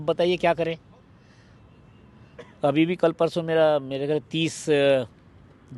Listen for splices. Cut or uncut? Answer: uncut